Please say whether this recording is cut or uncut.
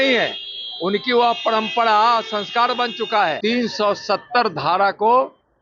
cut